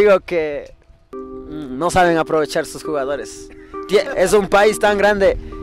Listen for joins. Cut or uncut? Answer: uncut